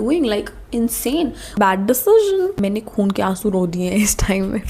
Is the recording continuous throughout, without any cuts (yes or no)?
no